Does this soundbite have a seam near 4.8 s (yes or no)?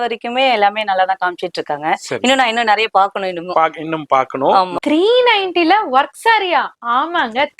yes